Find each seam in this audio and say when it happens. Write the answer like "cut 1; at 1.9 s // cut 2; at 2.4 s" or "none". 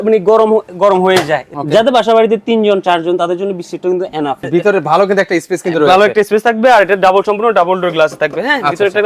cut 1; at 1.5 s // cut 2; at 4.4 s